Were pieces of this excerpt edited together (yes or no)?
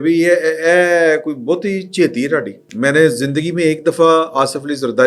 yes